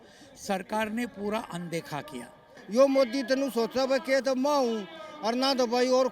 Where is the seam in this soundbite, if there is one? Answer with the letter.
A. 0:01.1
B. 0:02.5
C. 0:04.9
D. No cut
B